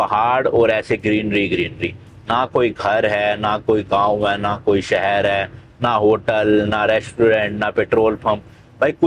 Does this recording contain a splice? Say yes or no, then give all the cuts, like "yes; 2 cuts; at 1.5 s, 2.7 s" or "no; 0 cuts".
no; 0 cuts